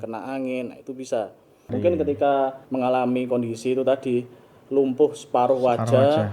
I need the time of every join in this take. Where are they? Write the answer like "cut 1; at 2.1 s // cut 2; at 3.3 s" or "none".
cut 1; at 1.7 s // cut 2; at 2.6 s

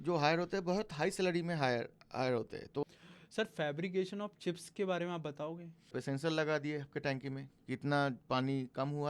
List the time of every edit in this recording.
cut 1; at 2.8 s // cut 2; at 6.0 s

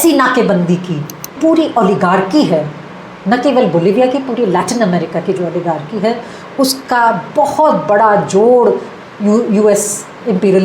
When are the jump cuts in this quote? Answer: cut 1; at 1.3 s

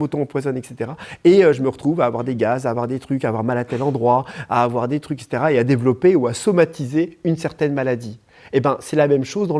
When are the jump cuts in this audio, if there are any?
none

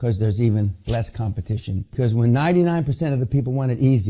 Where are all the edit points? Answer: cut 1; at 2.0 s

